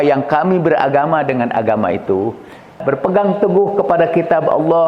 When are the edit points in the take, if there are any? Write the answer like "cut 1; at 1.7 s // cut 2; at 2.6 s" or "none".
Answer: cut 1; at 2.8 s